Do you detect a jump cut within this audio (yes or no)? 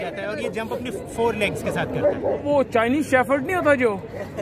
yes